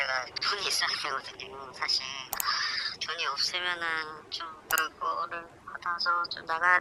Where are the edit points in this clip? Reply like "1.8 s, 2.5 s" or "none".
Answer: none

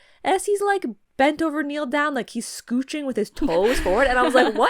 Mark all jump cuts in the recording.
1.0 s

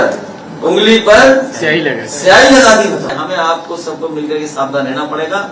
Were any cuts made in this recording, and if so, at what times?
3.1 s

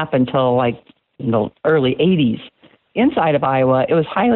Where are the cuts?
2.8 s

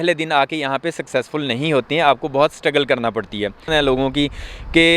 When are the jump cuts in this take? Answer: 3.7 s

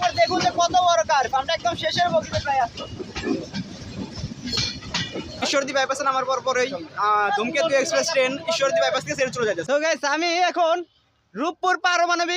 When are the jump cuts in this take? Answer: 5.4 s, 9.6 s

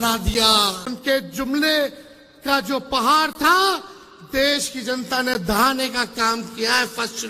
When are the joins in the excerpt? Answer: 0.9 s

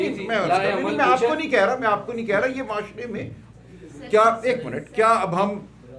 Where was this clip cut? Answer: 3.4 s

